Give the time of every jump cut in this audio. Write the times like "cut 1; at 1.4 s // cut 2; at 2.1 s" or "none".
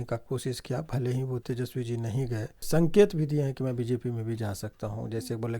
cut 1; at 1.4 s // cut 2; at 2.6 s